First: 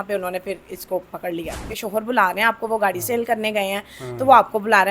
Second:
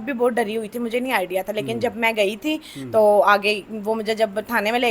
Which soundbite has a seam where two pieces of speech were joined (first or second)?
first